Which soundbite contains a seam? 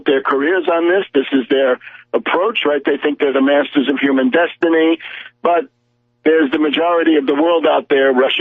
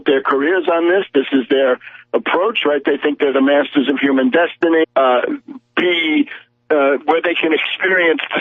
first; 1 cut; at 4.8 s

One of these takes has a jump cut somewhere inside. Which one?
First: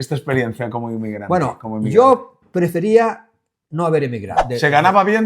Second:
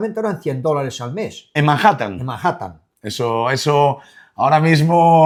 first; 1 cut; at 4.3 s

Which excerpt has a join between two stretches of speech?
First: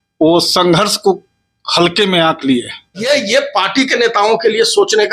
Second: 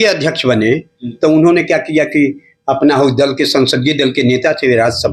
first; 1 cut; at 3.1 s

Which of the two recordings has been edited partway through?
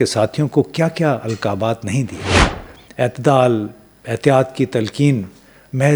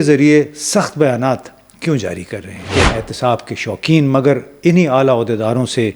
second; 1 cut; at 2.6 s

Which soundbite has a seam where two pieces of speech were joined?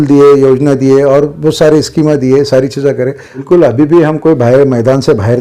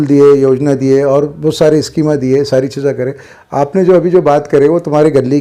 first; 1 cut; at 3.3 s

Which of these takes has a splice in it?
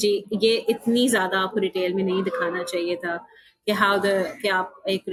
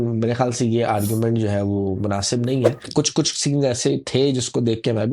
second; 1 cut; at 2.9 s

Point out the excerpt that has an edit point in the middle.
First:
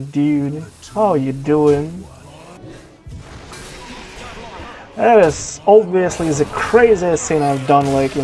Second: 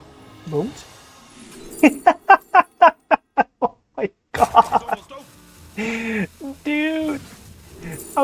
first; 1 cut; at 2.6 s

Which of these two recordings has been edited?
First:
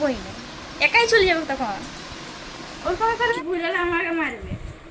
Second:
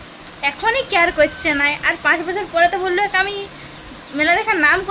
first; 1 cut; at 3.3 s

